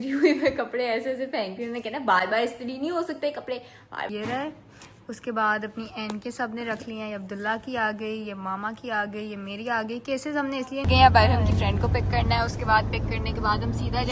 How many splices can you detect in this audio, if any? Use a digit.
2